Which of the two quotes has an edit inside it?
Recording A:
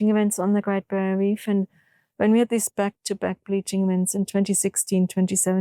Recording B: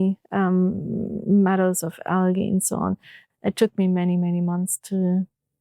B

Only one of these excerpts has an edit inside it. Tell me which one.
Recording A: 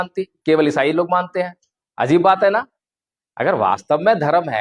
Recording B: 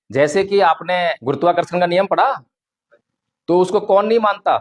B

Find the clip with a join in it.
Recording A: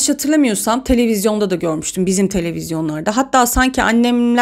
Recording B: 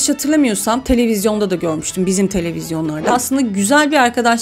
B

